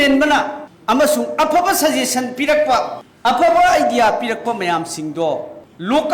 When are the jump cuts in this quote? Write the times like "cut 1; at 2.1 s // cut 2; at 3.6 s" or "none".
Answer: none